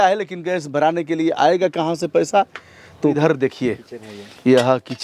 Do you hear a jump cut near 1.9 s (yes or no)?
no